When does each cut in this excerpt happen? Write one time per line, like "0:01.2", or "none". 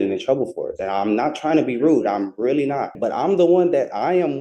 0:02.9